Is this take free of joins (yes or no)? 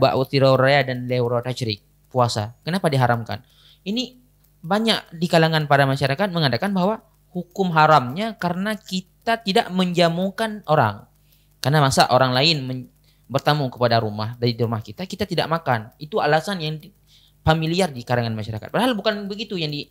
yes